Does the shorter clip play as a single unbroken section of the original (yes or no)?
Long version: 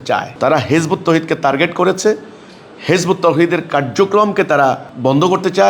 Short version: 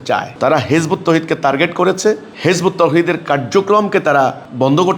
no